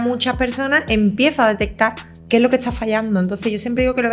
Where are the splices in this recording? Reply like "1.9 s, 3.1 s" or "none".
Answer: none

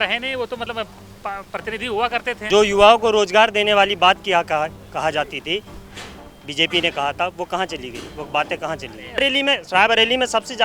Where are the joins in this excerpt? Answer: 2.4 s, 9.2 s

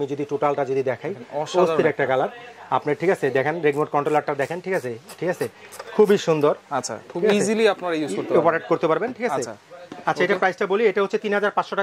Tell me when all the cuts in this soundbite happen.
none

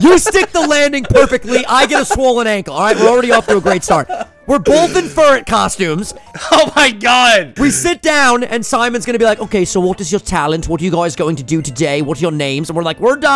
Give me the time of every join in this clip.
7.5 s

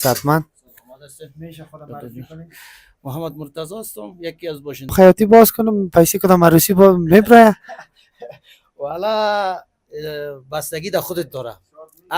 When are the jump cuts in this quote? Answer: 4.9 s

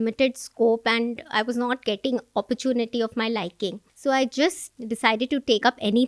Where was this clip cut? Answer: 3.9 s, 4.6 s

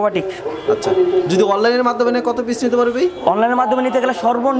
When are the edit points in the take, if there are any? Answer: none

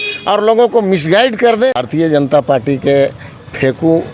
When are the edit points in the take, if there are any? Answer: 1.8 s

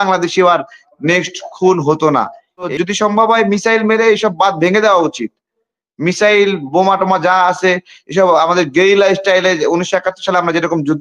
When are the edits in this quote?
2.7 s

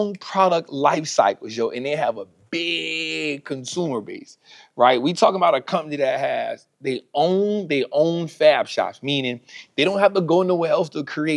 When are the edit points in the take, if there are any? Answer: none

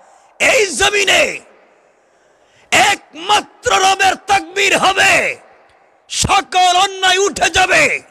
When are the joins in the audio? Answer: none

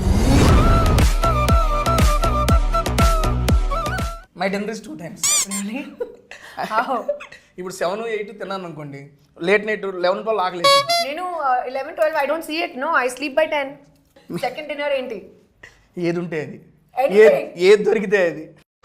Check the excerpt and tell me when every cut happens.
4.1 s, 14.2 s

